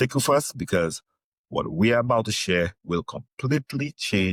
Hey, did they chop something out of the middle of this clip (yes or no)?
no